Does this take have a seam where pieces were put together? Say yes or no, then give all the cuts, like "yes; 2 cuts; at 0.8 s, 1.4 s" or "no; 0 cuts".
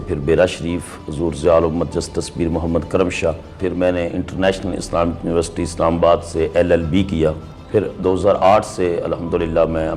yes; 2 cuts; at 3.6 s, 7.5 s